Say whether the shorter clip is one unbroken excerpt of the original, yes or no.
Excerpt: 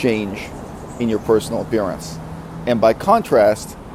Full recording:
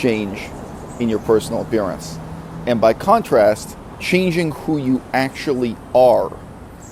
yes